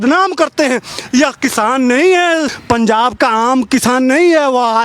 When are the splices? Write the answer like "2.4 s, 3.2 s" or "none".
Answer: 2.5 s